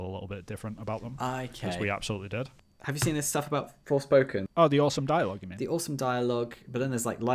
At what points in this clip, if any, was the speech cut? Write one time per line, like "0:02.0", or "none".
0:02.7
0:04.5